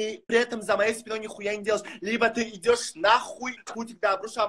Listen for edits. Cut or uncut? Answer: cut